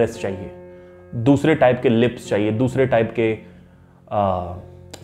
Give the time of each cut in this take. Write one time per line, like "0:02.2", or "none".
none

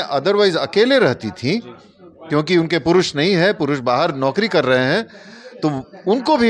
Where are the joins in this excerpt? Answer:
none

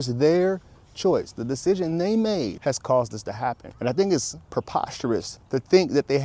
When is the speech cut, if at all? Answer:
0:02.6
0:03.7
0:05.4

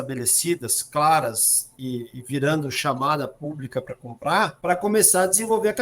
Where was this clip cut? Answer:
0:01.7
0:04.6

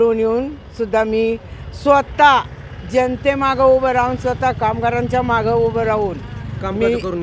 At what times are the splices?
none

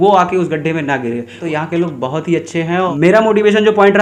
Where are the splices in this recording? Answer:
0:01.4
0:02.9

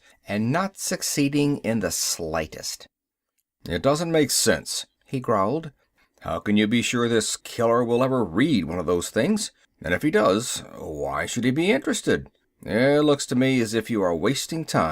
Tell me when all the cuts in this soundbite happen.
0:13.7

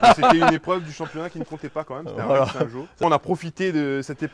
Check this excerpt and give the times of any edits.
0:03.0

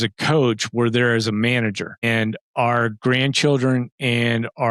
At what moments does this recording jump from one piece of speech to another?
none

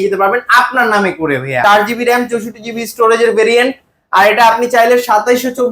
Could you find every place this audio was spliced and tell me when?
0:01.6

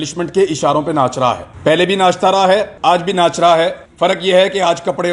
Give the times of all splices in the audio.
0:01.5
0:02.7
0:03.8

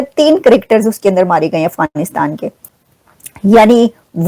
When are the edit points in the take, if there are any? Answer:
0:02.7

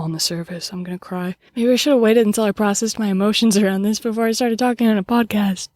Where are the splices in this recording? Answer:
0:01.4

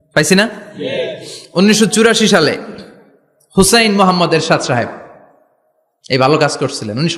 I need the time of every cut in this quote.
none

